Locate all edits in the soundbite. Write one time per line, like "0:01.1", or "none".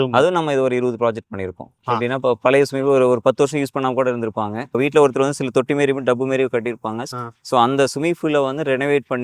0:01.8
0:04.8
0:07.0